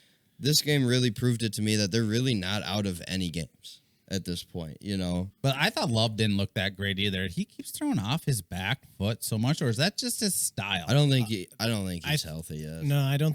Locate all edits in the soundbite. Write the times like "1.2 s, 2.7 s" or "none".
5.3 s